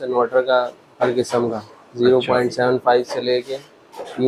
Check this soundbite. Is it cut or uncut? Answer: uncut